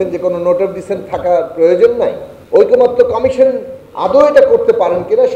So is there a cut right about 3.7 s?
no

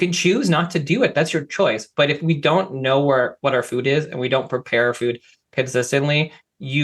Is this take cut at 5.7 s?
no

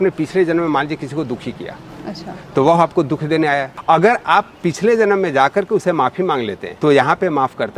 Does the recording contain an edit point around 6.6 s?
yes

